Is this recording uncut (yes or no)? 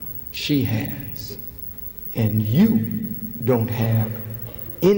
yes